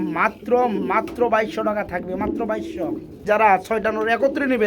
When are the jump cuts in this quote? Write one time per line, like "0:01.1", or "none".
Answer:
0:03.2